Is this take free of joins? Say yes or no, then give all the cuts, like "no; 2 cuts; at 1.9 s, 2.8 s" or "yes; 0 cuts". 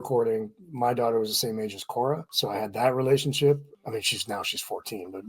no; 2 cuts; at 2.3 s, 3.7 s